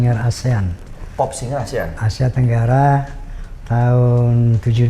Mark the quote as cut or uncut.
uncut